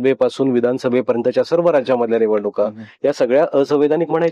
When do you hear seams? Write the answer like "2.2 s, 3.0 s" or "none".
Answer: none